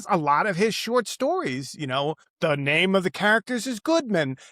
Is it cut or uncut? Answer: cut